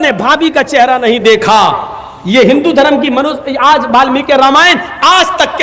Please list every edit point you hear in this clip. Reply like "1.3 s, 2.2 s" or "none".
none